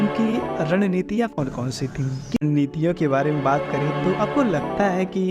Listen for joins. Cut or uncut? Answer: cut